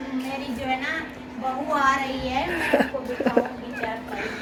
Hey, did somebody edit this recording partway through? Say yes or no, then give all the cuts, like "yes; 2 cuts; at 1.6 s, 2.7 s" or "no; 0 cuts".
no; 0 cuts